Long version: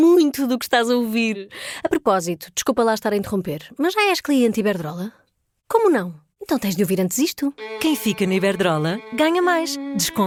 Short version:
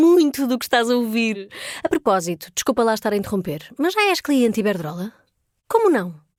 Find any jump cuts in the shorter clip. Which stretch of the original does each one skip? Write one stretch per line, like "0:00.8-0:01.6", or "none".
none